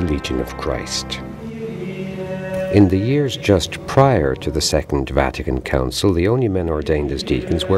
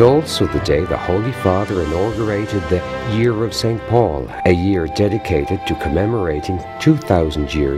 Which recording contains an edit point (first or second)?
first